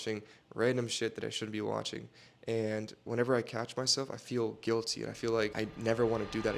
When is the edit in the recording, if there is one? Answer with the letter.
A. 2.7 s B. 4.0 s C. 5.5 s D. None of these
C